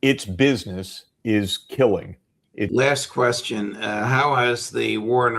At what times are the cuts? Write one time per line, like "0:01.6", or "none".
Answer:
0:02.7